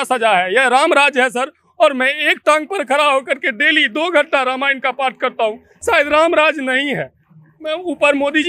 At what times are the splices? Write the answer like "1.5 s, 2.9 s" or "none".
none